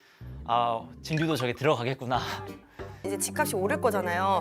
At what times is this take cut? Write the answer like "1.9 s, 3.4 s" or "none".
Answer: 3.1 s